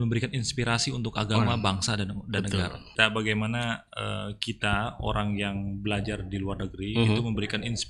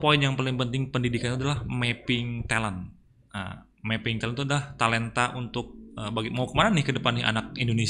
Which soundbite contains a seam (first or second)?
first